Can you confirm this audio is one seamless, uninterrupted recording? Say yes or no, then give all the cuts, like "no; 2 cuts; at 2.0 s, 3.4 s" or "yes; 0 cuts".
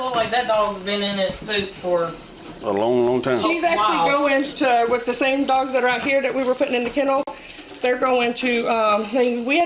yes; 0 cuts